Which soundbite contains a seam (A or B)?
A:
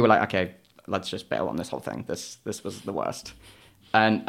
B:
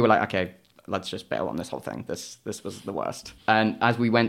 B